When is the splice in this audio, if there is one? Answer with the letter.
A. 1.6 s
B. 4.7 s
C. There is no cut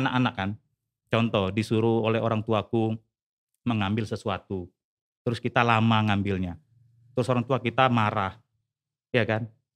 C